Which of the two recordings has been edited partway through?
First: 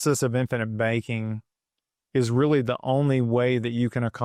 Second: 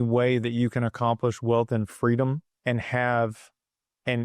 second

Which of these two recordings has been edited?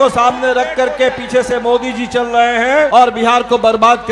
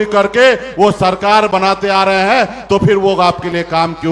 first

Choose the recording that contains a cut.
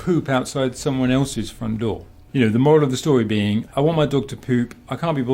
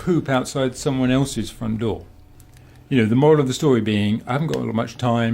first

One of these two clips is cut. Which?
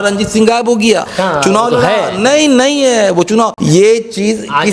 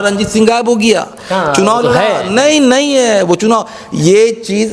first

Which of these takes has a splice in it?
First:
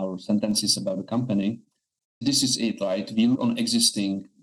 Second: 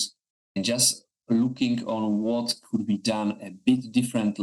first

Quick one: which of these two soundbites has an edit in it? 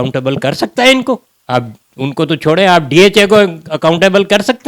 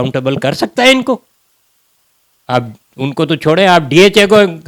first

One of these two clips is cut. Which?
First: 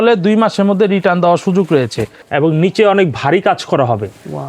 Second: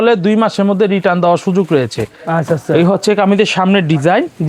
first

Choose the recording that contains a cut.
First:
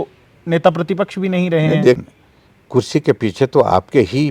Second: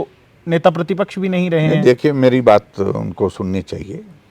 first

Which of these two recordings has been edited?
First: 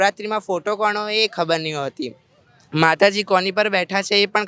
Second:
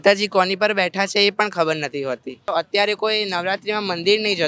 second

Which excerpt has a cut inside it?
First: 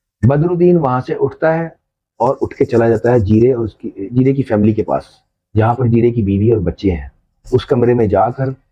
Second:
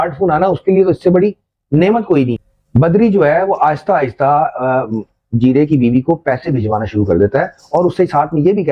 second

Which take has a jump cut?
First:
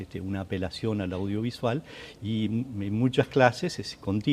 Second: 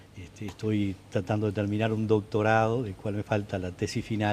first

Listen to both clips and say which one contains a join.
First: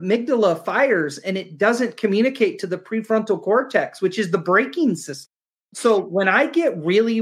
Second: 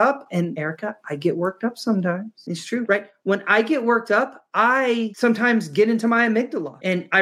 first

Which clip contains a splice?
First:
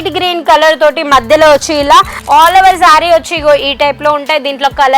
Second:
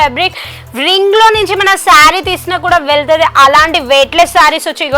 first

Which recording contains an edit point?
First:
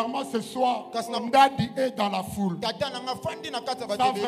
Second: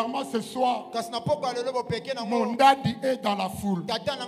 first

